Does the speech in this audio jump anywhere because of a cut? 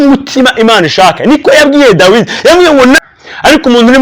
yes; 1 cut; at 3.0 s

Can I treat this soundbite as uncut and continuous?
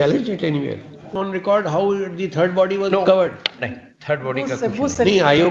no; 1 cut; at 1.1 s

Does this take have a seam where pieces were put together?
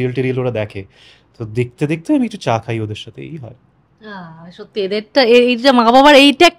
no; 0 cuts

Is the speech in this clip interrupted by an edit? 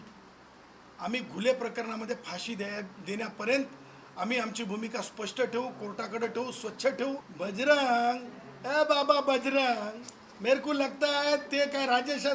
yes; 1 cut; at 7.3 s

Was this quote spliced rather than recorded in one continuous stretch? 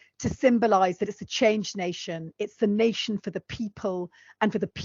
no; 0 cuts

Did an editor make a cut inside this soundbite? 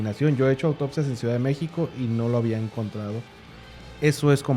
yes; 1 cut; at 3.5 s

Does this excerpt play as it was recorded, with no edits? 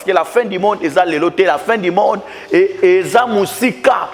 yes; 0 cuts

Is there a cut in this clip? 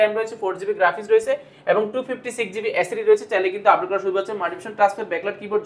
no; 0 cuts

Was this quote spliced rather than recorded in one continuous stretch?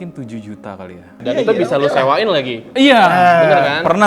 yes; 1 cut; at 1.2 s

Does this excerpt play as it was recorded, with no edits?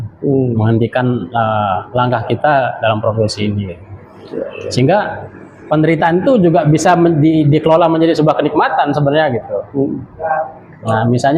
yes; 0 cuts

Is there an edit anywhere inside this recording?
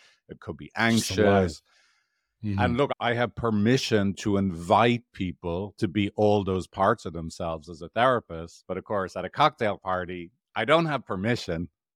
no; 0 cuts

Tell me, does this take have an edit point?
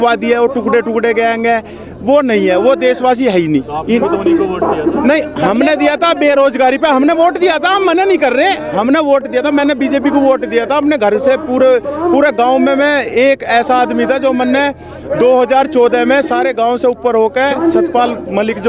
no; 0 cuts

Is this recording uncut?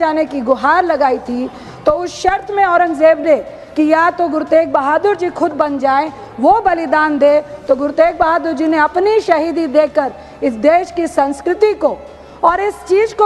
yes; 0 cuts

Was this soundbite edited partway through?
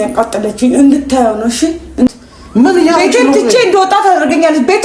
yes; 1 cut; at 2.1 s

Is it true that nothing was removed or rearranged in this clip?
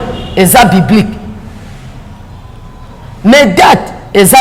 yes; 0 cuts

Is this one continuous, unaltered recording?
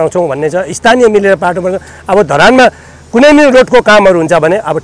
yes; 0 cuts

